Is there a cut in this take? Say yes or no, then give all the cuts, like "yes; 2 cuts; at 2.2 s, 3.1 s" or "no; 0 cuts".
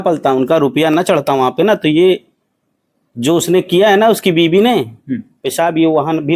no; 0 cuts